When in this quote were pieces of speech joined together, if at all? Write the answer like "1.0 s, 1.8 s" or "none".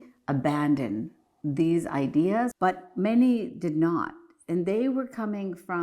2.5 s